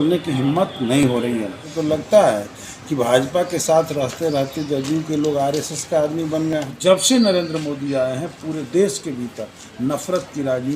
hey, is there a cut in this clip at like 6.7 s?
yes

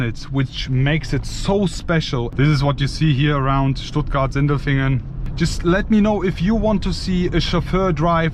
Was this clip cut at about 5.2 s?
yes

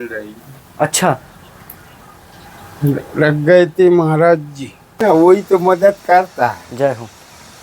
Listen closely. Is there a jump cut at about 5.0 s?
yes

